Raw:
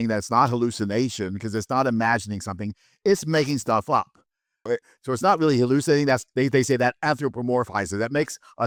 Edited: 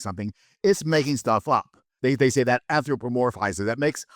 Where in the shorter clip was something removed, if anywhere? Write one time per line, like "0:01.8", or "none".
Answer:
0:01.9